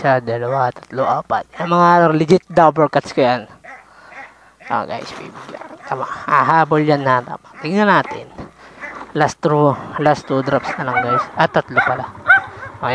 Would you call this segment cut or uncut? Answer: uncut